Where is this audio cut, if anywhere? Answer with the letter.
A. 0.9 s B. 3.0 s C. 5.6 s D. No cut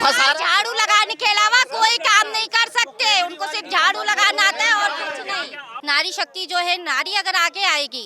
C